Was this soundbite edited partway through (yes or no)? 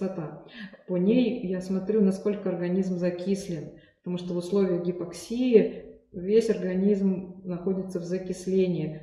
no